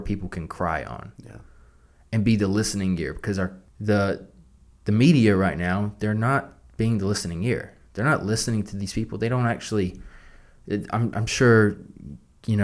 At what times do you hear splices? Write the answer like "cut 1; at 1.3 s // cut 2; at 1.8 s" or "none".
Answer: cut 1; at 3.7 s